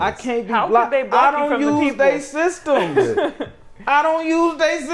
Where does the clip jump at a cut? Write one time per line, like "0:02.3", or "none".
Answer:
none